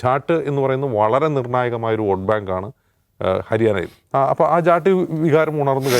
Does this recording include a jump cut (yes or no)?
yes